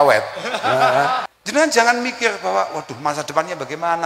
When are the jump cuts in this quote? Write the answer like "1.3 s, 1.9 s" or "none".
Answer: 1.3 s